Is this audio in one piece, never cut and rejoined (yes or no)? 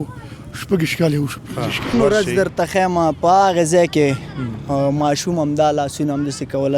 no